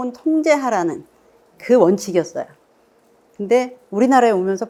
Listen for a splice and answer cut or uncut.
uncut